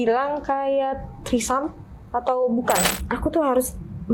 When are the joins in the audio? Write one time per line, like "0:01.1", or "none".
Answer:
0:02.9